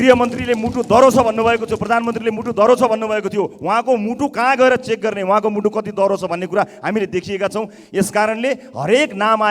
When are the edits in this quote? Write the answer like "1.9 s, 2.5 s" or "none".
none